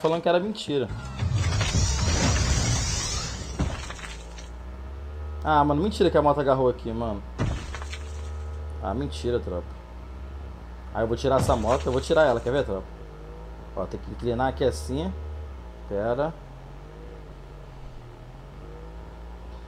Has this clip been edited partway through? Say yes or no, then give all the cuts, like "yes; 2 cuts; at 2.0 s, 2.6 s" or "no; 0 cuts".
no; 0 cuts